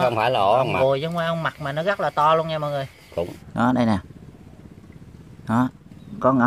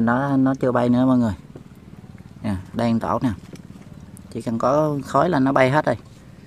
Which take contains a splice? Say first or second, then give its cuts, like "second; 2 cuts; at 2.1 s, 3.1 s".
first; 1 cut; at 3.4 s